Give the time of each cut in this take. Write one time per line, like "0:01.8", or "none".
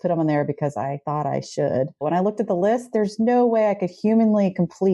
0:01.0
0:02.0